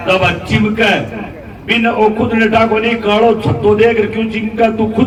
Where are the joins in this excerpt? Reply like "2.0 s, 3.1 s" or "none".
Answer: none